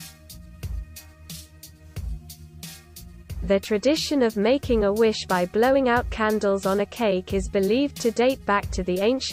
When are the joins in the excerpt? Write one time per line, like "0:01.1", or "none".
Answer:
0:03.4